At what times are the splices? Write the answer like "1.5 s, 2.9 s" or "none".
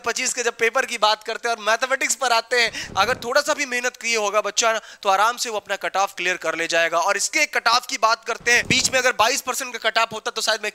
2.8 s, 8.6 s